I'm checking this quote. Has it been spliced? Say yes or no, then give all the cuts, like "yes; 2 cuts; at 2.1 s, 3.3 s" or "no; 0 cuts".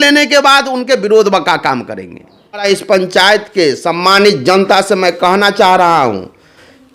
yes; 1 cut; at 2.7 s